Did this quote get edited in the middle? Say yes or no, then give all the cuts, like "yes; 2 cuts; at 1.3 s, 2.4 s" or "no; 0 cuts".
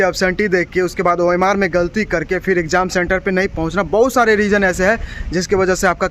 no; 0 cuts